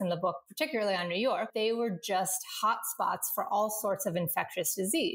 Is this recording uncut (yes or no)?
no